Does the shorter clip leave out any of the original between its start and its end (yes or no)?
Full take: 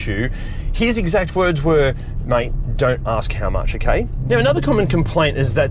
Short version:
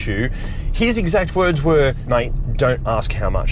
yes